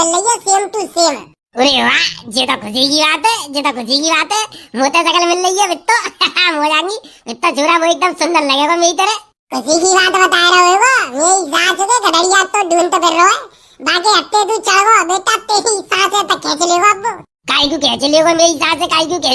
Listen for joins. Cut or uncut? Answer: uncut